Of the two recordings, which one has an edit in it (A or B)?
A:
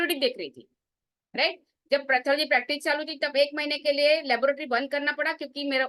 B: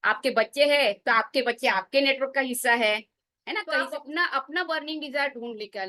B